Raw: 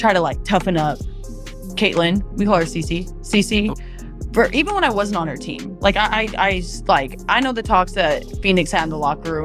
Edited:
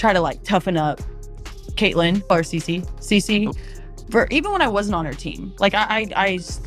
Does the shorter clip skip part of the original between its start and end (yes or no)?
yes